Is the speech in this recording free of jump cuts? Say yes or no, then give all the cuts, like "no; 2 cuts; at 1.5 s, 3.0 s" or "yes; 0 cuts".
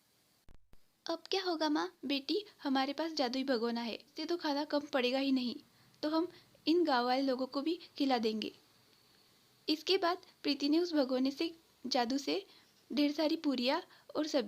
no; 2 cuts; at 2.0 s, 4.2 s